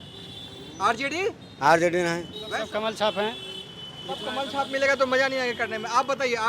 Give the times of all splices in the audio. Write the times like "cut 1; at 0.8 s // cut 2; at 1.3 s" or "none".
cut 1; at 2.6 s